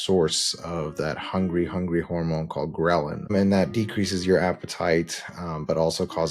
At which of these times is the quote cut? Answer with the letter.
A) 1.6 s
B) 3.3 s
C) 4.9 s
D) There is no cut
B